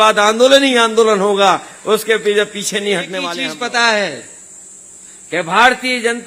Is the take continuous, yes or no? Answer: no